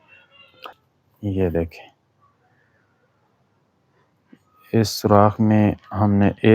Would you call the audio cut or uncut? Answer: cut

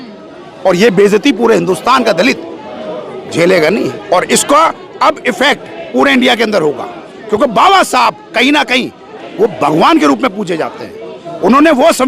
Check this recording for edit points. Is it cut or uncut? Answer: uncut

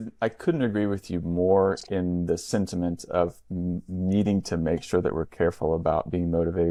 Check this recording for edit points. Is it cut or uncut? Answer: uncut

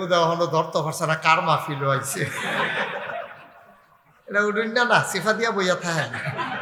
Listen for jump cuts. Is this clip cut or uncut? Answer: uncut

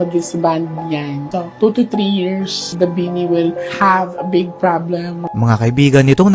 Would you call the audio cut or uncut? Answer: cut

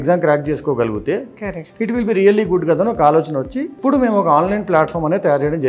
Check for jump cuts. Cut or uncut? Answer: cut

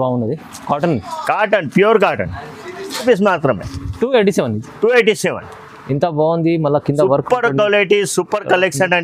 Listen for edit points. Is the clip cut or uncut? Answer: cut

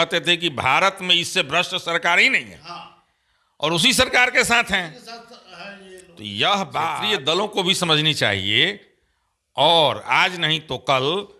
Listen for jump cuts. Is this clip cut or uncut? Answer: cut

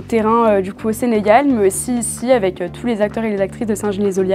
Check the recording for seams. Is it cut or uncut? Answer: uncut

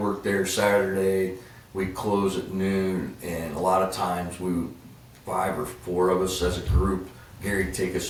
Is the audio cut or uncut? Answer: uncut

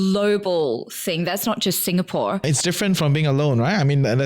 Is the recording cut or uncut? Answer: cut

